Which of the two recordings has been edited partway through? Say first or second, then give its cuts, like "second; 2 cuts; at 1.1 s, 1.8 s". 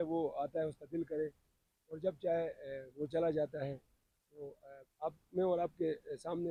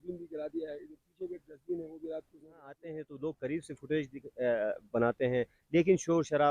second; 1 cut; at 2.9 s